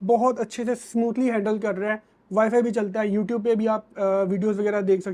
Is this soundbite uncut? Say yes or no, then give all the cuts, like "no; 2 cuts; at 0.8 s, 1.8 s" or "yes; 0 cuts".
yes; 0 cuts